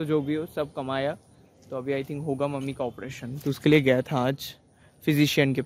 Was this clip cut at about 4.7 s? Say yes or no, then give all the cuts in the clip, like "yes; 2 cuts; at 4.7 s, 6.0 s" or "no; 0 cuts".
no; 0 cuts